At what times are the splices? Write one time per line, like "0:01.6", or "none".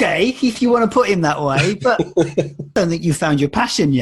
0:02.7